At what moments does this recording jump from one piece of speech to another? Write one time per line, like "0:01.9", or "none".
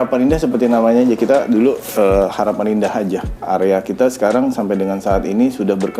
0:03.3